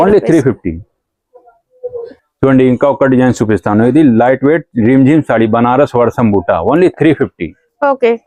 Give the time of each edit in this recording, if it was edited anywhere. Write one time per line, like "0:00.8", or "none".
none